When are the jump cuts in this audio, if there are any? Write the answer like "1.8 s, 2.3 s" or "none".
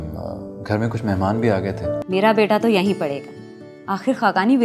2.0 s